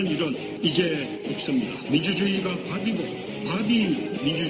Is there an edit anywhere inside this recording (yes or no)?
no